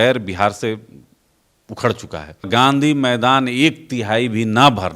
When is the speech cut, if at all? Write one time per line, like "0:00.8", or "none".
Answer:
0:02.5